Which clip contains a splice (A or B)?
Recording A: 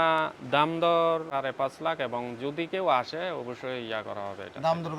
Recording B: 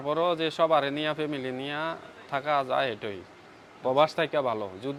A